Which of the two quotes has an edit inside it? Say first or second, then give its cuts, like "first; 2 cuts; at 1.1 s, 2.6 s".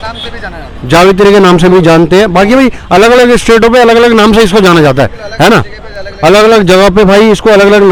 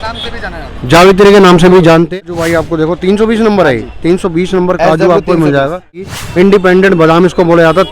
second; 2 cuts; at 2.2 s, 6.1 s